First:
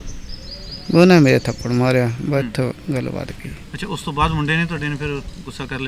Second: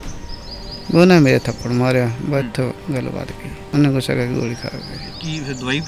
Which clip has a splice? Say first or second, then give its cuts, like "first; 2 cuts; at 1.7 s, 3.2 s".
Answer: second; 1 cut; at 3.6 s